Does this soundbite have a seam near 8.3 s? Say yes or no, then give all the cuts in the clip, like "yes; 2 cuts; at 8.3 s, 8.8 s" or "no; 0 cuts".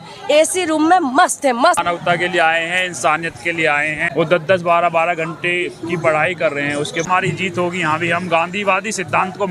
no; 3 cuts; at 1.9 s, 4.0 s, 7.0 s